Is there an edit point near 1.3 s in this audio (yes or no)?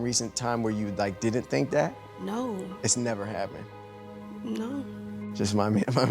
no